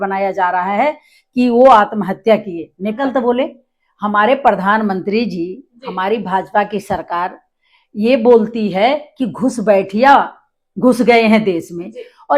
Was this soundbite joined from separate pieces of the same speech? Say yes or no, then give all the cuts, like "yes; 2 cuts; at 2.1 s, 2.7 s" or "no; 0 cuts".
yes; 1 cut; at 3.0 s